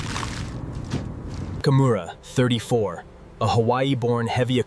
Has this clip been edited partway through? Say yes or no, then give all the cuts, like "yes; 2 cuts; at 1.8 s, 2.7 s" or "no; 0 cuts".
no; 0 cuts